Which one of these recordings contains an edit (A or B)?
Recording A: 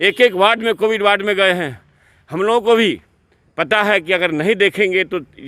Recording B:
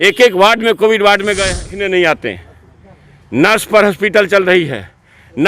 B